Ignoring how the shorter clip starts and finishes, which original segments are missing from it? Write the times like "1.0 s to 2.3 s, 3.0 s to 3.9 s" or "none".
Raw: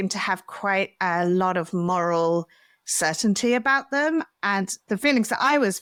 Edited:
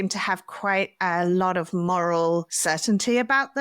2.5 s to 2.9 s